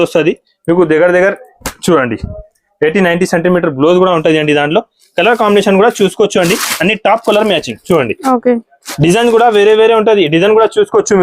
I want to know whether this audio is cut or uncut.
uncut